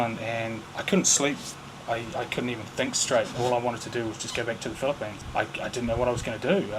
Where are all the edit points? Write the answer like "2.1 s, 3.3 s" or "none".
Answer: none